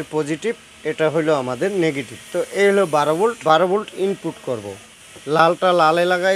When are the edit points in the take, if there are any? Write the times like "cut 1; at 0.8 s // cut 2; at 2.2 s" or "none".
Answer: cut 1; at 3.4 s // cut 2; at 4.8 s